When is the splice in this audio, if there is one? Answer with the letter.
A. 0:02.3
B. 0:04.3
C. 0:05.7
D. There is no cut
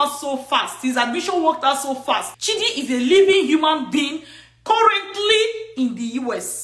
A